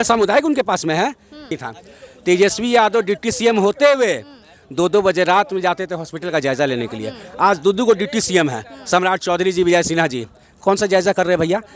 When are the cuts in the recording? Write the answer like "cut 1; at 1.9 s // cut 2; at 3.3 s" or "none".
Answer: cut 1; at 1.6 s